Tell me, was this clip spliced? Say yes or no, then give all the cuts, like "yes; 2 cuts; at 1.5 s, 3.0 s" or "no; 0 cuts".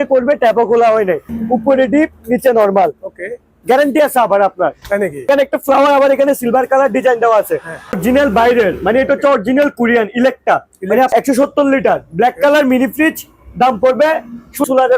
yes; 4 cuts; at 1.3 s, 5.3 s, 8.0 s, 11.1 s